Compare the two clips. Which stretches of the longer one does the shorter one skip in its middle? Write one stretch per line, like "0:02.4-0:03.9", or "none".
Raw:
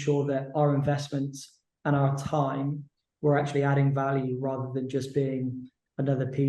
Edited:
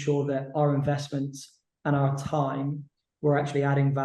none